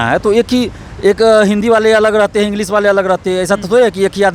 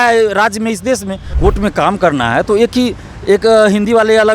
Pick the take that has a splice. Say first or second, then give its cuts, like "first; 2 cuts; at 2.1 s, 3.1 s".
second; 1 cut; at 1.2 s